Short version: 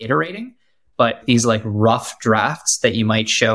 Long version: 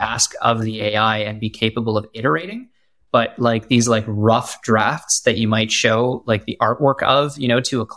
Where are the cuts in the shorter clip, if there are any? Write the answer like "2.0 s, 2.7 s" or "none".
1.2 s